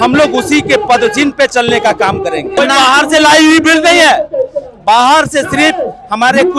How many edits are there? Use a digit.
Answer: 1